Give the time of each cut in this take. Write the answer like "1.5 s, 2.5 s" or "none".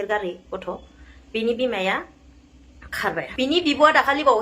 3.2 s